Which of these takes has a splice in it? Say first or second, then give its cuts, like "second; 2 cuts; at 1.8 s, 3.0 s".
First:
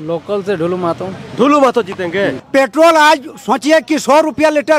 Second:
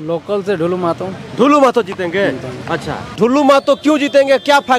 first; 1 cut; at 2.4 s